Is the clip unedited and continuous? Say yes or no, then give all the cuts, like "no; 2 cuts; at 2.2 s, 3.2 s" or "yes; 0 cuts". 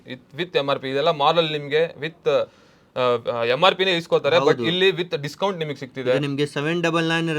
yes; 0 cuts